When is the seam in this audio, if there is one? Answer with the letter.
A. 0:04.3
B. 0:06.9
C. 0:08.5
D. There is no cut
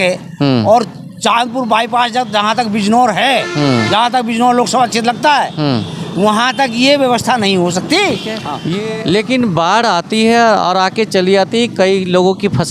C